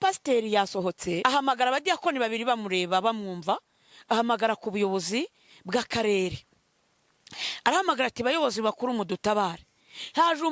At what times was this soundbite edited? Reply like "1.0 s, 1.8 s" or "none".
1.2 s